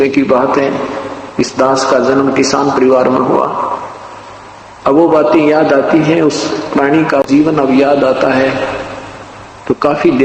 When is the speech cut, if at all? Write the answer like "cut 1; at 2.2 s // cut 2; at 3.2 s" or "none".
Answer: cut 1; at 7.2 s

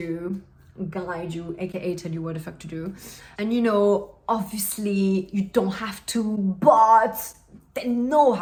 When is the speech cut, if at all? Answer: none

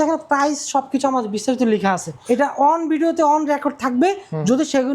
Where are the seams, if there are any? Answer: cut 1; at 2.2 s

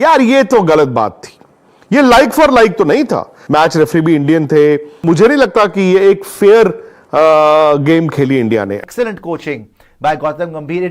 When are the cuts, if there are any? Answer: cut 1; at 3.4 s // cut 2; at 5.0 s // cut 3; at 8.8 s

